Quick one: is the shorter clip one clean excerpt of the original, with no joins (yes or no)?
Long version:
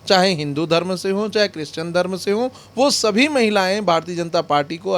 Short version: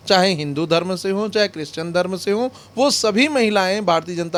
yes